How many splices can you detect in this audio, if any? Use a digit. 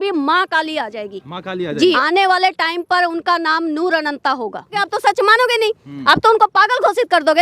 2